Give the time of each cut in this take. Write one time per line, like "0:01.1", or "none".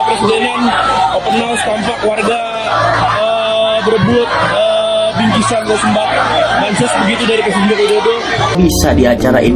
0:08.5